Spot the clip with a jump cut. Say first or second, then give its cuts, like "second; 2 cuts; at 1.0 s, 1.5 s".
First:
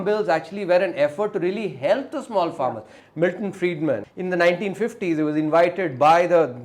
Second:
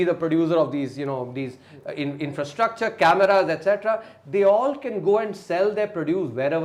first; 2 cuts; at 3.0 s, 4.1 s